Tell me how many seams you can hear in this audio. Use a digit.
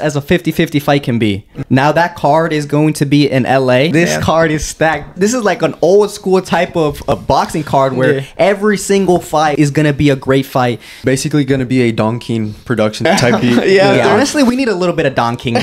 7